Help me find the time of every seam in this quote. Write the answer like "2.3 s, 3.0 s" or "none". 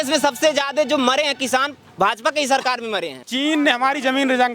3.3 s

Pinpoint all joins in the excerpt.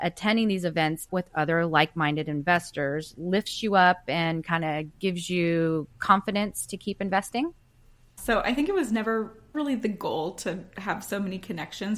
1.1 s, 8.1 s

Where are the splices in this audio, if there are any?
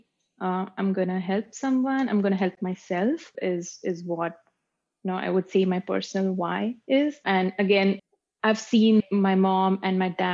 3.3 s, 8.0 s

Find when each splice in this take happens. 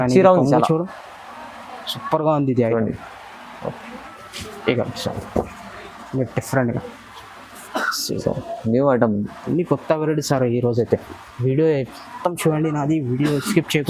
4.1 s

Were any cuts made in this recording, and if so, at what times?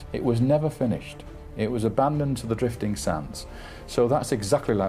3.8 s

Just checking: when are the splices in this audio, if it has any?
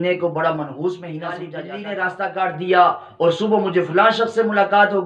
1.5 s

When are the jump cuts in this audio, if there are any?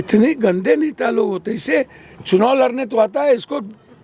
none

